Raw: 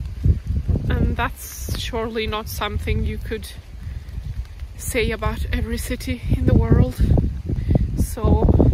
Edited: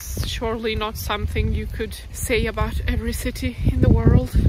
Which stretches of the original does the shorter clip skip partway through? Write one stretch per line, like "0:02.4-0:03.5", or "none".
0:03.6-0:04.7